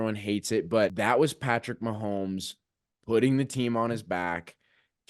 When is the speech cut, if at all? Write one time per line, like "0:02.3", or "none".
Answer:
0:00.9

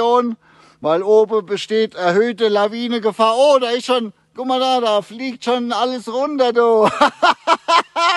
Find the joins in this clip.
none

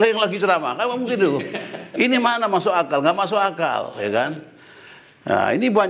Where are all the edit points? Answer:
none

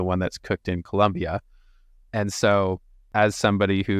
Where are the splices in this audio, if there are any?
0:03.0

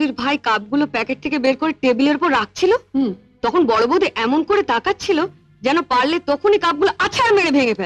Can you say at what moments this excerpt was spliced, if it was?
none

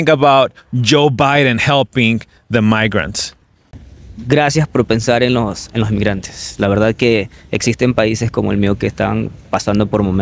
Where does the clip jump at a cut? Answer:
0:03.4

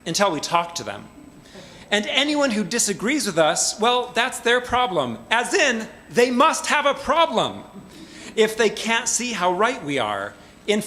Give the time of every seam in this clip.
0:07.9

